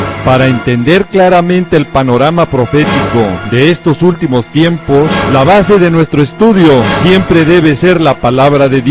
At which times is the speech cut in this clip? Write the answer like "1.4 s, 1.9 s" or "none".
none